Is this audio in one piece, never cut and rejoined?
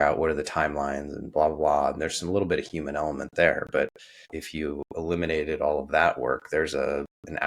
yes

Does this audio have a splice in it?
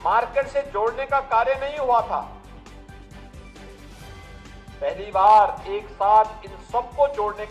yes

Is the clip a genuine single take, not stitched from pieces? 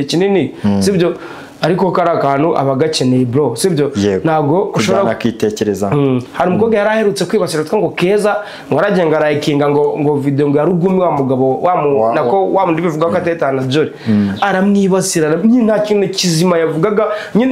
no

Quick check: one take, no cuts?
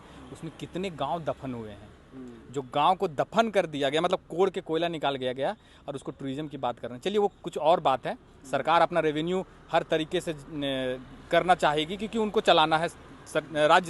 yes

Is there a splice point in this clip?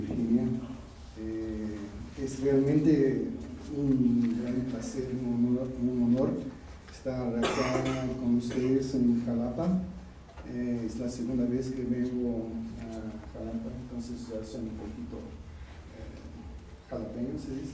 yes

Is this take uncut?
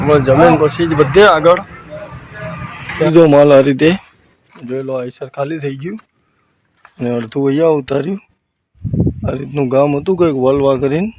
no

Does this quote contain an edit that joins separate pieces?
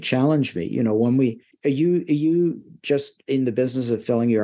yes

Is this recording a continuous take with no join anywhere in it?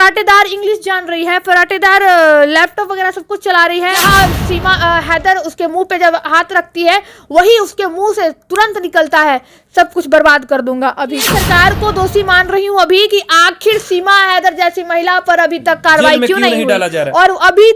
no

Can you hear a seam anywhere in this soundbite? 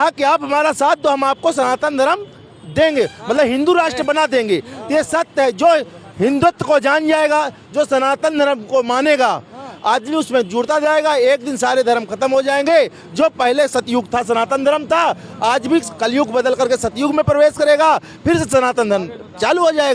no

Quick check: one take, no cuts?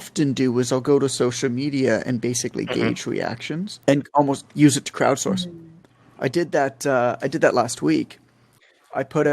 no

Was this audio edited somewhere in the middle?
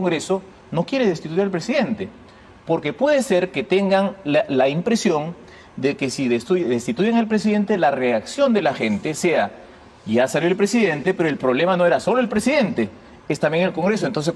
no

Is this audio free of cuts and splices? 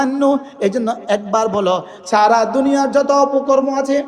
no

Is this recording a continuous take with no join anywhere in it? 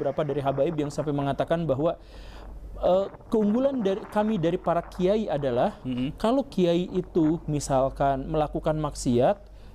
yes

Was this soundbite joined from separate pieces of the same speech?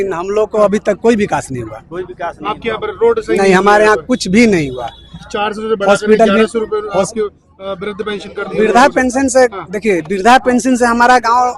no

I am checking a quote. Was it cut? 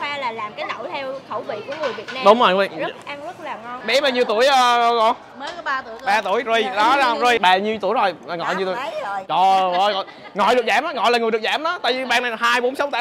yes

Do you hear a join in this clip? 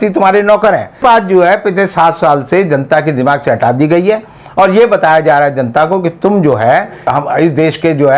yes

